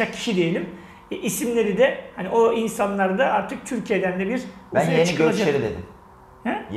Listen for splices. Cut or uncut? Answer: uncut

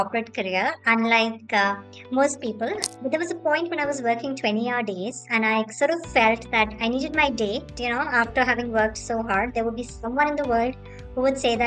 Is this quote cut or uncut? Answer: cut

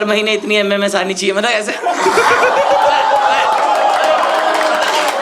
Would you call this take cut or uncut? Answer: uncut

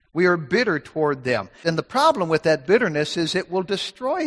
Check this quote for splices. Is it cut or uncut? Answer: cut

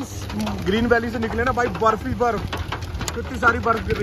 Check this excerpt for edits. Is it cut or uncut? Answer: uncut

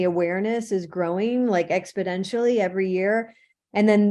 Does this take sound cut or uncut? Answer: uncut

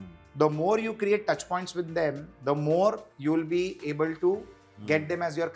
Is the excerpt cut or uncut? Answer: uncut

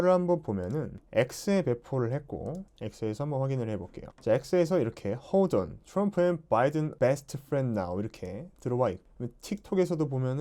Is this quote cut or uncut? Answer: cut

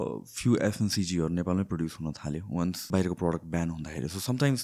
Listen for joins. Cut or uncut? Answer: cut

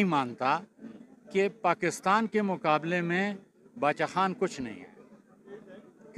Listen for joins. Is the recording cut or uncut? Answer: uncut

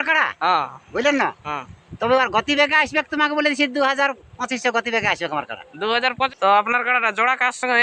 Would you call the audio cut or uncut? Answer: cut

